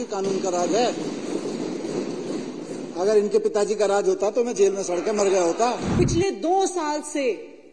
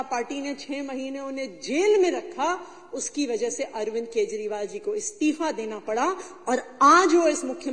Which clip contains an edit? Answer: first; 1 cut; at 5.9 s

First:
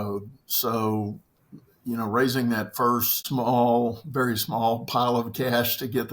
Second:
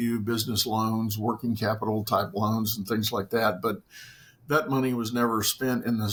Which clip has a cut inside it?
first; 1 cut; at 3.1 s

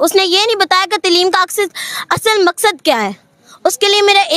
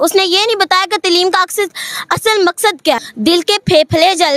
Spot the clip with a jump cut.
second; 1 cut; at 3.1 s

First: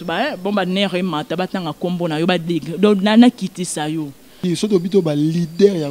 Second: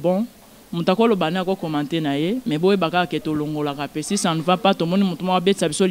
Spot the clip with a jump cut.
first; 1 cut; at 4.3 s

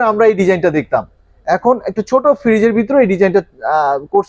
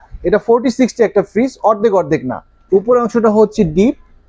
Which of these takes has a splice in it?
second; 1 cut; at 2.6 s

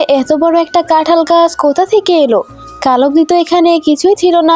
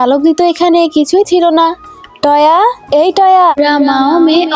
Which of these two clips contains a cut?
second; 1 cut; at 3.6 s

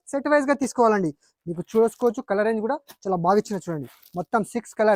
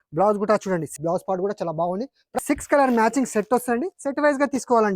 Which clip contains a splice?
second; 2 cuts; at 0.9 s, 2.4 s

